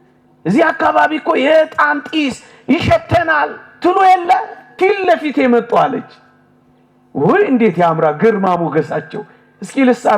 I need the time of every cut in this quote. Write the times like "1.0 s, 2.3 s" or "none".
4.6 s